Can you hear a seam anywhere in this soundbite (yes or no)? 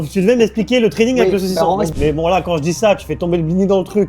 yes